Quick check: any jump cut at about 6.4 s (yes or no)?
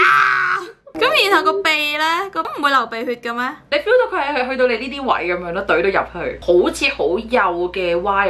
no